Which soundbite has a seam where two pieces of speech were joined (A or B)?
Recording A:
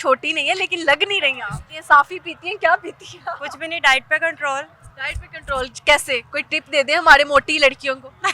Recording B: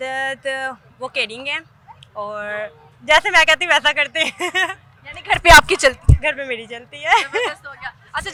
A